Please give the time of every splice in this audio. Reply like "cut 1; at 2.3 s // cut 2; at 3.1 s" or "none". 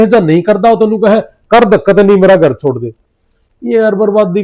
none